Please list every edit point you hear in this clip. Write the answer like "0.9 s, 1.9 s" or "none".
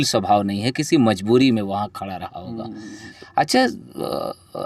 3.0 s